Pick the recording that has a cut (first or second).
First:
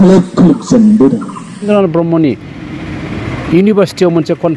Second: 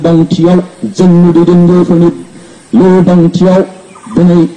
first